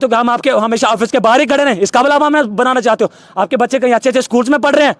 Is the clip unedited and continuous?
yes; 0 cuts

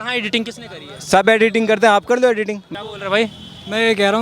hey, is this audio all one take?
no; 1 cut; at 2.6 s

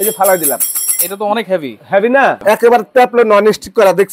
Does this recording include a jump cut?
yes; 1 cut; at 2.4 s

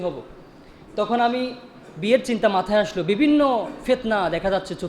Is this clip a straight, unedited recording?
yes; 0 cuts

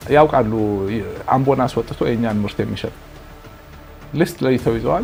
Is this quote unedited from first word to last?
yes; 0 cuts

